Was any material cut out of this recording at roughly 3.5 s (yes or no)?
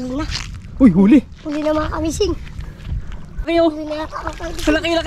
yes